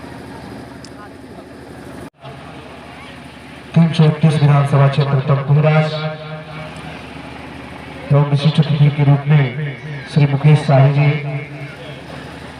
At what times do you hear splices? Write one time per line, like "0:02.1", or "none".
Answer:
0:01.2